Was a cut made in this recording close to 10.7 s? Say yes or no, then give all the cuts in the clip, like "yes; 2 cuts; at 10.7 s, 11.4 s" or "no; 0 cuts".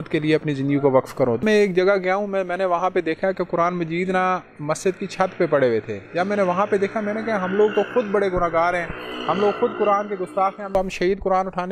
yes; 2 cuts; at 1.4 s, 10.7 s